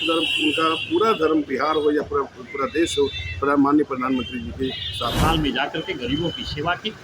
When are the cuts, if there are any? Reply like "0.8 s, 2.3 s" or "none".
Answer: 5.2 s